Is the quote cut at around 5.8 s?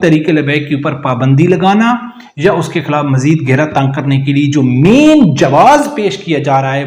no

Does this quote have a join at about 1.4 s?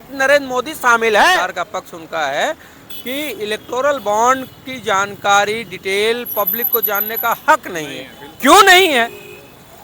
yes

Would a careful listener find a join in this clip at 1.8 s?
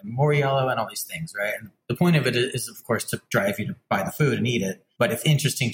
yes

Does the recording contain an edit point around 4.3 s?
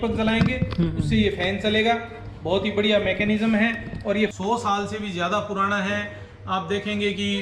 yes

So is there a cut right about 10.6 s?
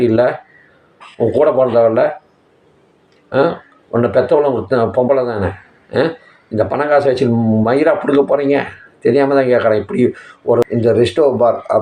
yes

